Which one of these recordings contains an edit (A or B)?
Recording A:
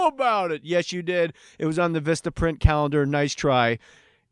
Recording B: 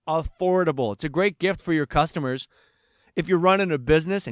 B